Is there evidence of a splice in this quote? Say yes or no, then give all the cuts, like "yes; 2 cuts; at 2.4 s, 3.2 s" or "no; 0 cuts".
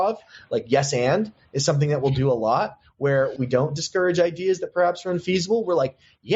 yes; 1 cut; at 3.3 s